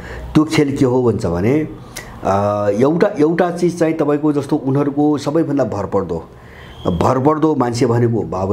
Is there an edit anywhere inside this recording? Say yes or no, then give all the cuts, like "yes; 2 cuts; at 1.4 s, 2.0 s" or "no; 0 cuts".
no; 0 cuts